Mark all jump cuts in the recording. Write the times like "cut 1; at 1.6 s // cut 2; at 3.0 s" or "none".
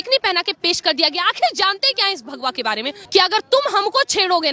cut 1; at 3.0 s